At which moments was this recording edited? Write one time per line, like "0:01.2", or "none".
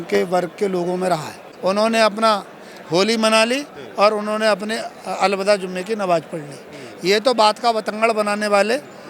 0:01.4